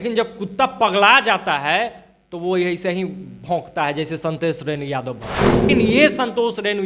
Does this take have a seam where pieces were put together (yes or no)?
yes